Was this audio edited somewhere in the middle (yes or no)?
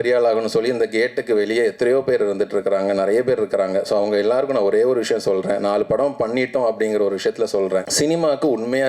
yes